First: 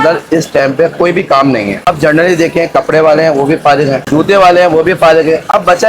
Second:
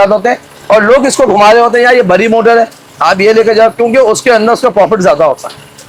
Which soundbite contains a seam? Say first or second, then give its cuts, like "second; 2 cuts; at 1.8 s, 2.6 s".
first; 2 cuts; at 1.9 s, 4.0 s